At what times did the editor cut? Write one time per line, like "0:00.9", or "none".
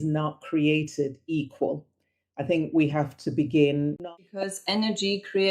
0:04.0